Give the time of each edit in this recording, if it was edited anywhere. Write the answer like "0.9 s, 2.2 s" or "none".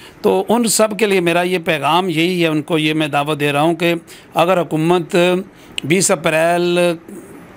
none